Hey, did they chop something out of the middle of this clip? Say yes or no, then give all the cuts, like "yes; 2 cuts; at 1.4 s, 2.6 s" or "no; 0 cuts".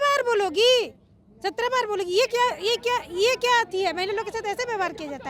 no; 0 cuts